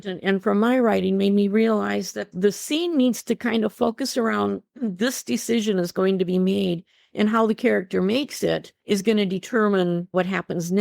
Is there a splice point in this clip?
yes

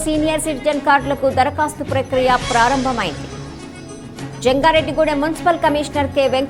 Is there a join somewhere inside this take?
no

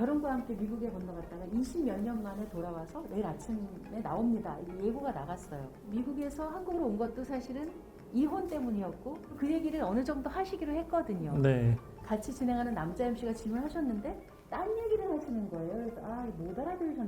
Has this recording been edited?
yes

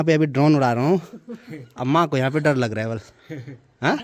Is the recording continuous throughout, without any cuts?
yes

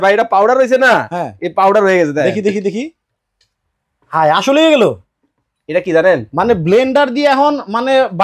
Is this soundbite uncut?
yes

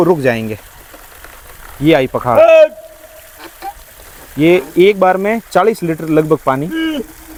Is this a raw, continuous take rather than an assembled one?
yes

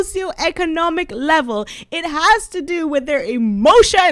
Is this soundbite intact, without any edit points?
yes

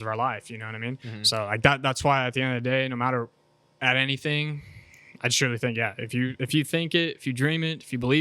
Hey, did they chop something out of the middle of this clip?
yes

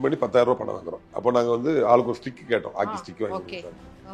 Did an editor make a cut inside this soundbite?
yes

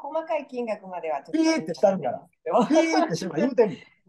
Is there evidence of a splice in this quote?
no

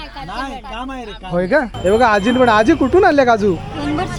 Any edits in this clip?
yes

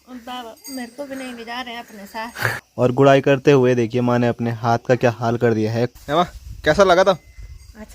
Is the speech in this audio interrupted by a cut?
yes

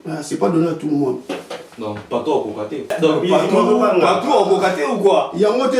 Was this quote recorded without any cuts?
no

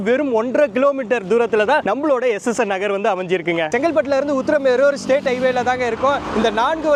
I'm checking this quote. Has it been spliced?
no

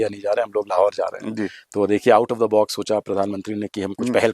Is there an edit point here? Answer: no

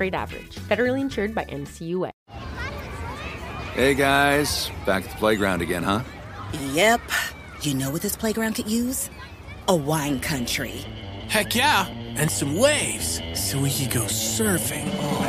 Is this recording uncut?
no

